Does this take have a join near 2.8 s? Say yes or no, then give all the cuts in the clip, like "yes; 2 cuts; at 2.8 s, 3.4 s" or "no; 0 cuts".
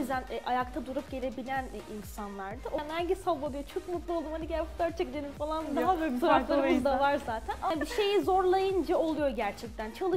yes; 2 cuts; at 2.8 s, 7.7 s